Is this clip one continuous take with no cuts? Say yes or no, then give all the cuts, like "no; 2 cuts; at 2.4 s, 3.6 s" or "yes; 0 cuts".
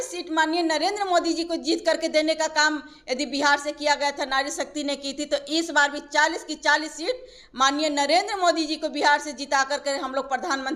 yes; 0 cuts